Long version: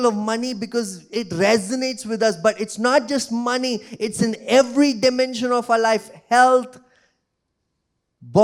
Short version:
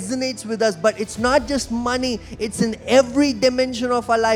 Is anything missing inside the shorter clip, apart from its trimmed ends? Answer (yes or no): no